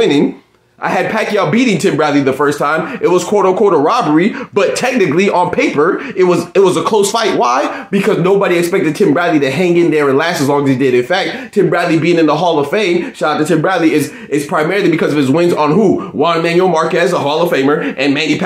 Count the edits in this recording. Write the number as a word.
zero